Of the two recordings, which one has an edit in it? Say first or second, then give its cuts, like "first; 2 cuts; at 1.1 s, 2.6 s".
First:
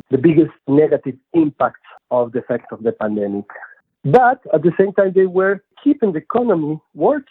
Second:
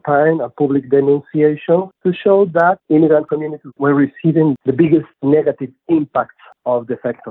first; 1 cut; at 3.7 s